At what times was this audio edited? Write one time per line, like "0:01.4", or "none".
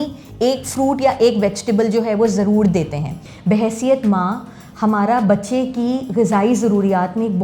0:03.3